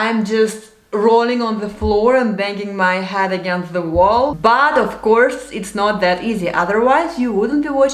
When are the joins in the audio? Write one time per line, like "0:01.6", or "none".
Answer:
0:04.4